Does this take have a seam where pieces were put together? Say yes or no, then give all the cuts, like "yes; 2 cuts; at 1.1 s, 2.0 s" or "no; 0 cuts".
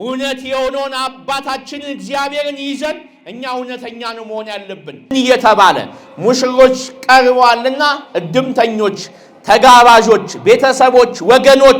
yes; 1 cut; at 5.1 s